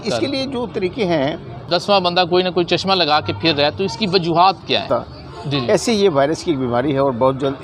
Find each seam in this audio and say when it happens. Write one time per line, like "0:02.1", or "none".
0:01.6
0:04.9